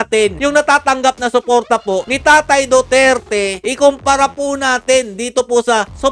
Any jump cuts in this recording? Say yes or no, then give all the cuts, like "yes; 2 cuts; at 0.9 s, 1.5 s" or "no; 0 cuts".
no; 0 cuts